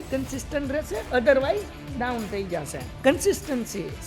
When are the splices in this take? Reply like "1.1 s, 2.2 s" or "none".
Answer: 1.0 s, 2.9 s